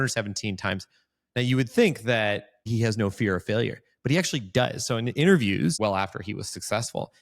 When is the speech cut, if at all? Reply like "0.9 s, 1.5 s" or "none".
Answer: 2.7 s, 5.8 s